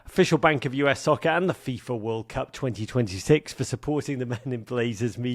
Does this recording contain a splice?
no; 0 cuts

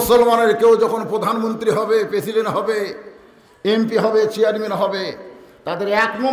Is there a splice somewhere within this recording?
no; 0 cuts

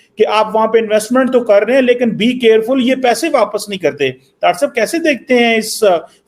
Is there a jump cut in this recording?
no; 0 cuts

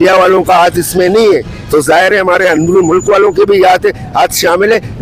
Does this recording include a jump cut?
no; 0 cuts

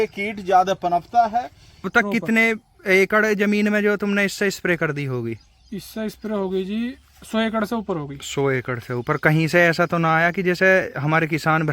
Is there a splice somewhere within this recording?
yes; 1 cut; at 1.9 s

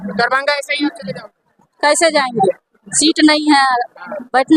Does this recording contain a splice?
no; 0 cuts

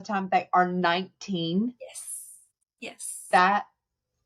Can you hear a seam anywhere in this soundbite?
no; 0 cuts

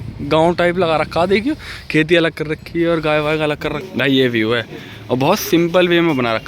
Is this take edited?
yes; 1 cut; at 3.8 s

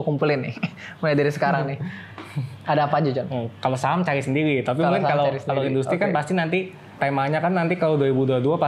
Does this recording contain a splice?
yes; 1 cut; at 6.9 s

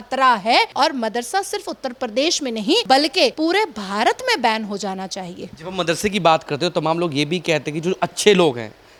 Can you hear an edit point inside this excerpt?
no; 0 cuts

